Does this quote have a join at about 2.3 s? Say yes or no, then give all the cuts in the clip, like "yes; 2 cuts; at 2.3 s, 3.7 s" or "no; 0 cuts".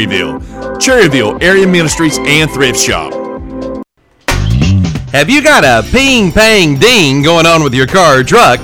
no; 1 cut; at 3.9 s